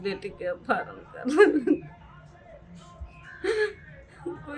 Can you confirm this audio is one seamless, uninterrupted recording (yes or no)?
yes